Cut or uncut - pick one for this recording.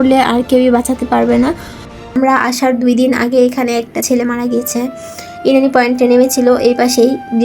cut